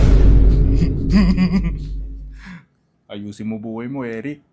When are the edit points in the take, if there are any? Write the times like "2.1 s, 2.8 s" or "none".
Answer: none